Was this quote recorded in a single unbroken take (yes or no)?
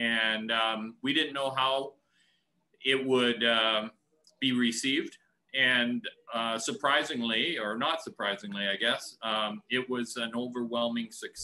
yes